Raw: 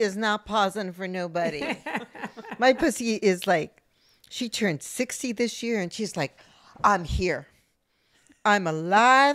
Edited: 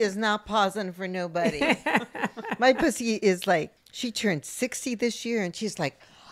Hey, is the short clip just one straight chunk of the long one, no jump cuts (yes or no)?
no